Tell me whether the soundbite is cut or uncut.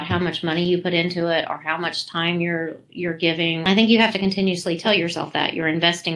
cut